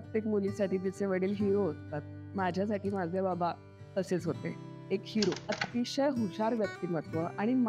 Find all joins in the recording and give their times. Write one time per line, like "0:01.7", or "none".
0:05.6